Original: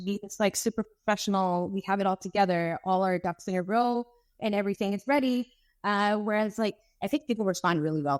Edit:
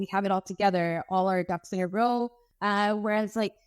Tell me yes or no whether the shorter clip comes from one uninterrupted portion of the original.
no